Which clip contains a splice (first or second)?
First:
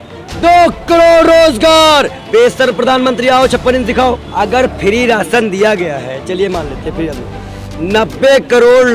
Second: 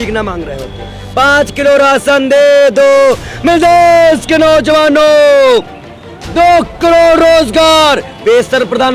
first